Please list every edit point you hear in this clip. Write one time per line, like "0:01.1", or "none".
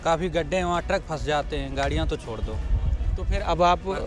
none